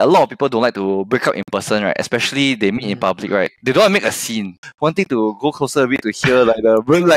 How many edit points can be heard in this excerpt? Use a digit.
2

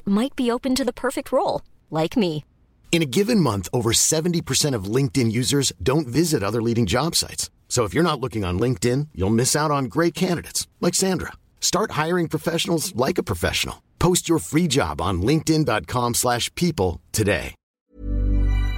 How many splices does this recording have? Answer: 1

